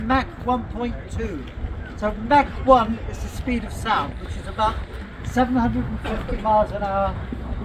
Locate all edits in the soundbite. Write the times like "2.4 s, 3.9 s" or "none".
none